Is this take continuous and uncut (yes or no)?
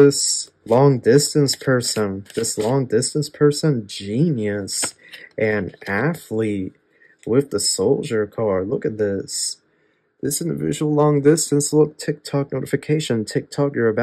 yes